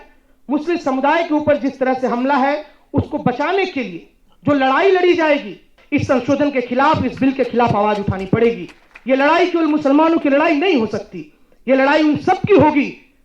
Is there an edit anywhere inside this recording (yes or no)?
yes